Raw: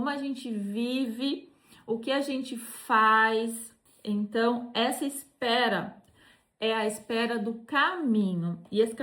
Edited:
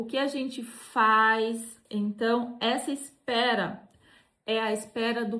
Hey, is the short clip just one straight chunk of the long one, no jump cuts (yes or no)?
no